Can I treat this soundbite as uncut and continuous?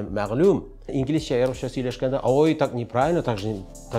no; 1 cut; at 0.9 s

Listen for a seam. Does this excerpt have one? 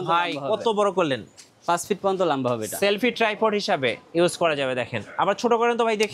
no; 0 cuts

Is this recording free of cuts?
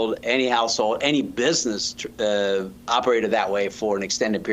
yes; 0 cuts

